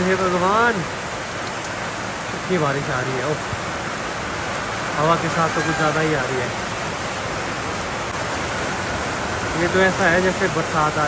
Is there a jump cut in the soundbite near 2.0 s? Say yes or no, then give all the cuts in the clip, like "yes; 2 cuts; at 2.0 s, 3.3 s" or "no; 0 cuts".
no; 0 cuts